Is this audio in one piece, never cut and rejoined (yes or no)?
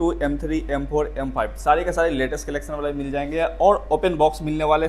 yes